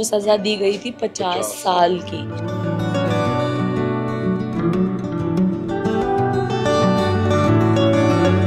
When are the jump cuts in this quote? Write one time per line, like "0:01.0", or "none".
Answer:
none